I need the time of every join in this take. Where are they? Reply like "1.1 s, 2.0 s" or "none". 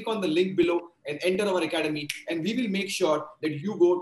none